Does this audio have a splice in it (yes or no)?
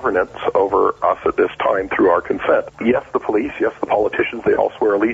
yes